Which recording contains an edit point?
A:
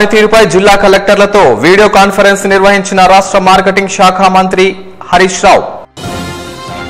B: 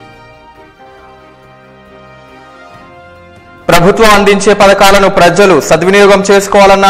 B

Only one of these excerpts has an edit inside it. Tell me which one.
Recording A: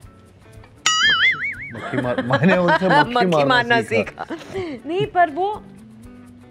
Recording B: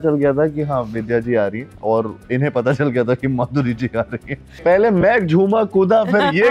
B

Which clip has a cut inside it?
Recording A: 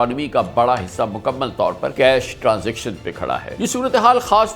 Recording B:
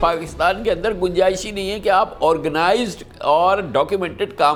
A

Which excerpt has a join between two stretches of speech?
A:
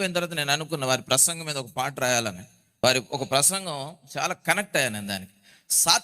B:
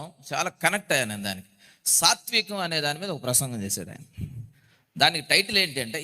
A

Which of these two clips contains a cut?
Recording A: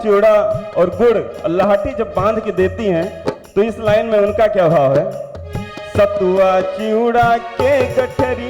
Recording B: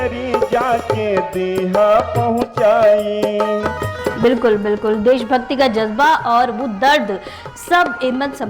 B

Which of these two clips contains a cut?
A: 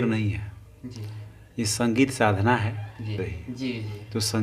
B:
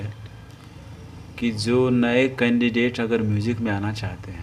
A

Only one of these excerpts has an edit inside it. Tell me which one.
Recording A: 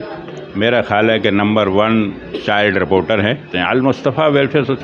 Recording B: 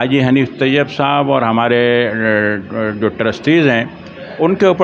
A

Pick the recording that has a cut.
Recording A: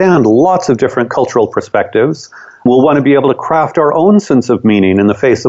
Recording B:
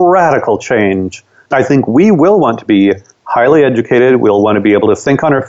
A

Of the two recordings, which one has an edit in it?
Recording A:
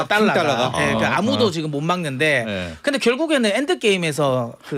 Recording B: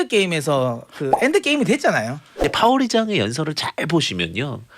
B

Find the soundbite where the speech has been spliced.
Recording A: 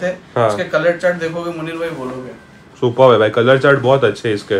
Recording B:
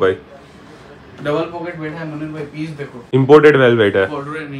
B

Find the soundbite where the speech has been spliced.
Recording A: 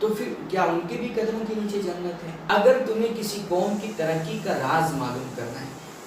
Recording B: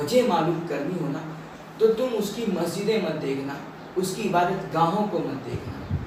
A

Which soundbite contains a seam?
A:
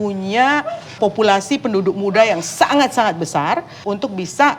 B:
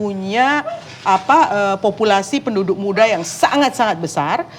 A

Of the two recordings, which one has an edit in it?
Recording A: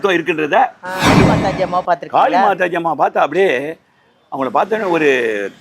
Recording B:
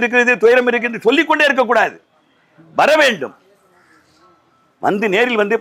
A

